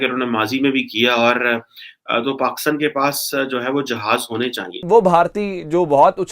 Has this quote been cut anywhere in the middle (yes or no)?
yes